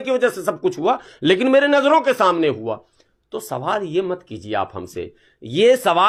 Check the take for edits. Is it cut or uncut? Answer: uncut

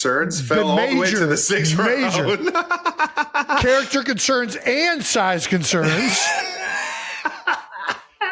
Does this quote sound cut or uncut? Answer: uncut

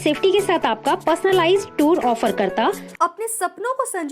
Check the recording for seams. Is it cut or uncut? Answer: cut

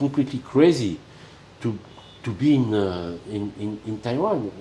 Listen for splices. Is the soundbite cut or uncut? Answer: uncut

